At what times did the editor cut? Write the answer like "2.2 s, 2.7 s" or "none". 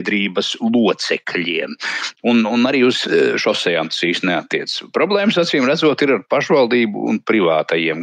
none